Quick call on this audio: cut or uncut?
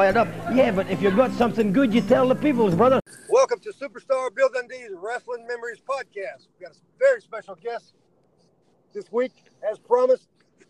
cut